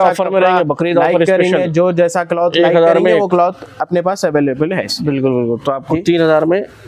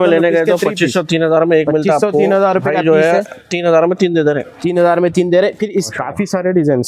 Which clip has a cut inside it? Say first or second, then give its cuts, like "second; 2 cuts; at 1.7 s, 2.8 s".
second; 1 cut; at 5.9 s